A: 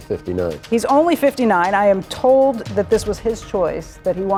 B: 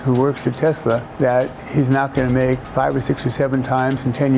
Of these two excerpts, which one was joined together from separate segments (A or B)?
B